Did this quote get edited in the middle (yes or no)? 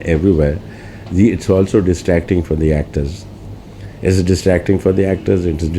no